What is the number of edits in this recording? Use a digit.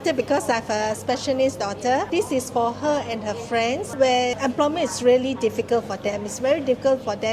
2